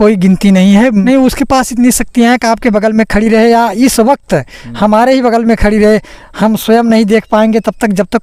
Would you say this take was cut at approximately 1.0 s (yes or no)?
yes